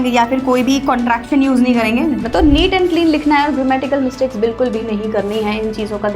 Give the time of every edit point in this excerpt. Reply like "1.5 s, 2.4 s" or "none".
2.2 s